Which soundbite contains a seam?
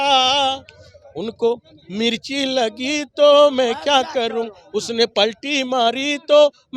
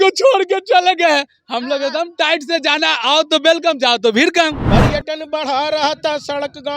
second; 1 cut; at 4.6 s

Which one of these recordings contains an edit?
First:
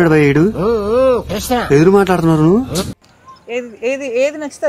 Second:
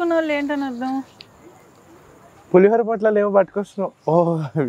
first; 1 cut; at 3.0 s

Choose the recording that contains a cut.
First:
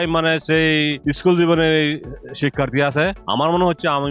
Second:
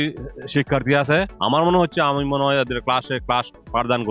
first; 1 cut; at 1.0 s

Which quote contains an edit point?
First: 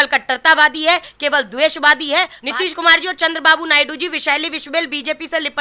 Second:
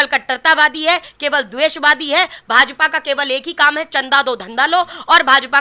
first; 1 cut; at 2.4 s

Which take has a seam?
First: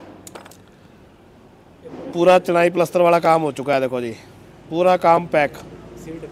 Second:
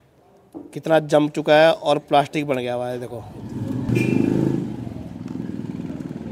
second; 1 cut; at 3.9 s

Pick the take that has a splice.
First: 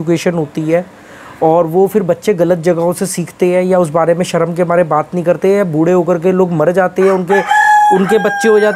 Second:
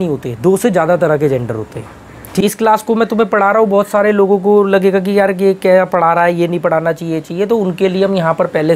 second; 1 cut; at 2.4 s

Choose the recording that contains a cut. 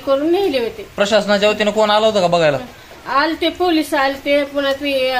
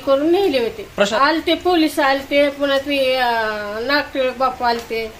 second; 1 cut; at 1.1 s

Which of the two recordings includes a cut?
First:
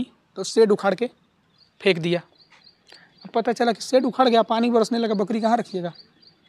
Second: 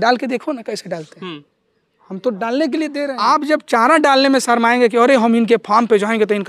second; 1 cut; at 3.0 s

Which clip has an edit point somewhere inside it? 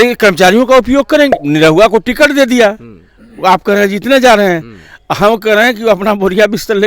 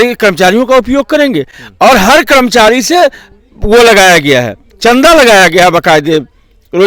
first; 1 cut; at 1.3 s

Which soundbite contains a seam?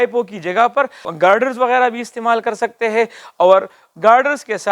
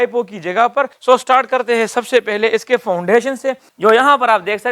second; 1 cut; at 0.9 s

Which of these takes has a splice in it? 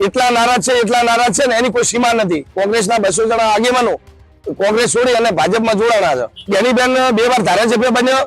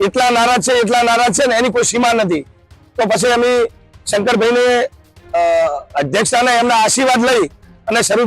first; 2 cuts; at 2.5 s, 6.3 s

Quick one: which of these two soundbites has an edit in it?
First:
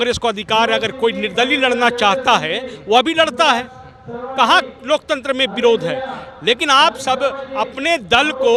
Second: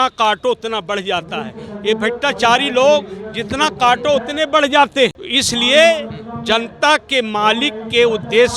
second; 1 cut; at 5.3 s

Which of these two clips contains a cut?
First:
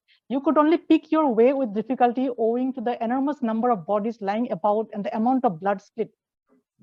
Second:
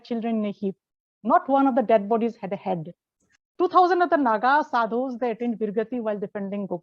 second; 1 cut; at 3.4 s

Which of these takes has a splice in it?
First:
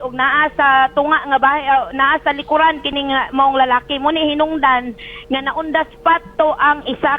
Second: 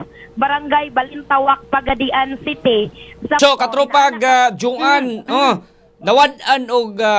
second; 1 cut; at 3.4 s

